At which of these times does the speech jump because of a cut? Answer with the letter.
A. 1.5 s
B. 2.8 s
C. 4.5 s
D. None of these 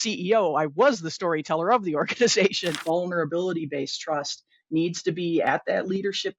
B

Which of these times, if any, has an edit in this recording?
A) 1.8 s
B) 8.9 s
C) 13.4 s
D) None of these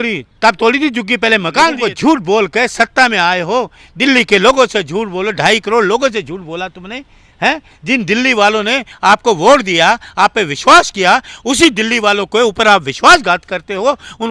A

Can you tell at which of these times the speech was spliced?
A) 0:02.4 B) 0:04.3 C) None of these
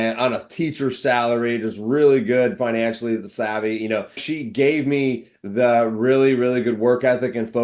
B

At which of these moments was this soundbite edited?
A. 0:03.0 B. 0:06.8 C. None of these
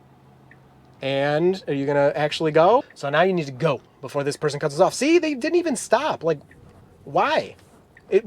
A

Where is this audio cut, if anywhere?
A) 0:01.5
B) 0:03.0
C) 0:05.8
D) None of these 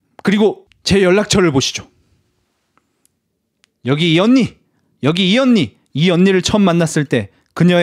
C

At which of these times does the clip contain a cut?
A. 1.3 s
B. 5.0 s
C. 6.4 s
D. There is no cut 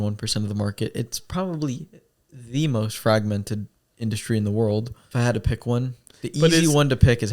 B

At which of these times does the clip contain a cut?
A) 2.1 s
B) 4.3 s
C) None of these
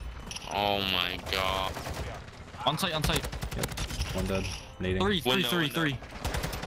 A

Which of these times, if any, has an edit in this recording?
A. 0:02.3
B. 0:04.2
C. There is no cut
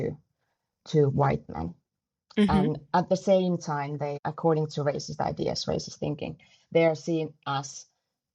B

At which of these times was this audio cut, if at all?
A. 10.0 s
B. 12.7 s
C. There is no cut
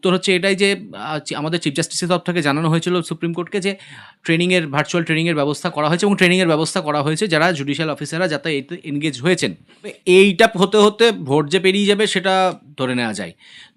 A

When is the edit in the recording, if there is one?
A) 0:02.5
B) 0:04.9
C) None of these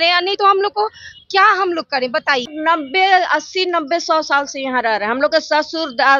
A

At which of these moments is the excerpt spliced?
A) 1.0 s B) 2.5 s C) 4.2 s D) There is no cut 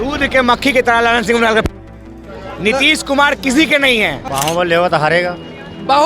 C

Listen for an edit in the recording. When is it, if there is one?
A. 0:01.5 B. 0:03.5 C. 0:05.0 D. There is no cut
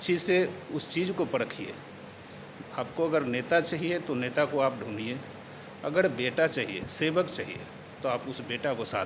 D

